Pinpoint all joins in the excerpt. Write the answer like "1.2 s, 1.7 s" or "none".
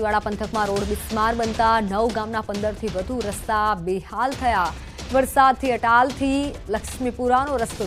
none